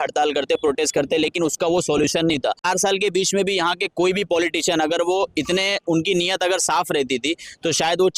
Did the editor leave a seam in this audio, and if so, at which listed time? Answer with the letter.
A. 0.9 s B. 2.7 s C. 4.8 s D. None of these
B